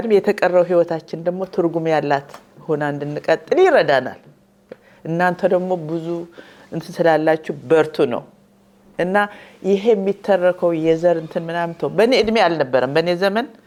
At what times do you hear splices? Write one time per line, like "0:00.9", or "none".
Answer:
none